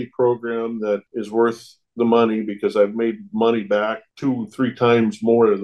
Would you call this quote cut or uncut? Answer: cut